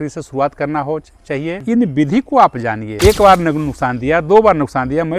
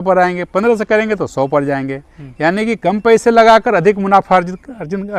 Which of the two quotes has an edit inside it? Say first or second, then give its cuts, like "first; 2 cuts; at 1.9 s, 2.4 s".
first; 2 cuts; at 1.6 s, 2.8 s